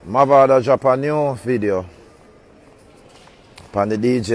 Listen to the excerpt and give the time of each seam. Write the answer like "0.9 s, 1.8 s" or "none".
none